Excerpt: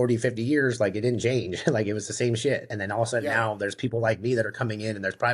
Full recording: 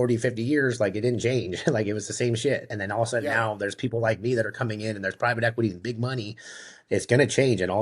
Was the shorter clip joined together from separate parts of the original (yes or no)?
no